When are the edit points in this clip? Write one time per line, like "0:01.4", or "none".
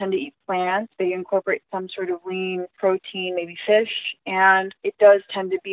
0:00.9
0:02.7
0:04.8